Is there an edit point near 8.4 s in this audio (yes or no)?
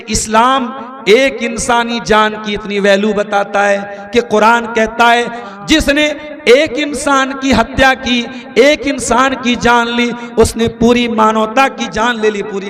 no